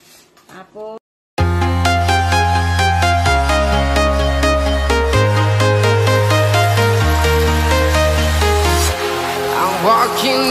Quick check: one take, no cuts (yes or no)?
no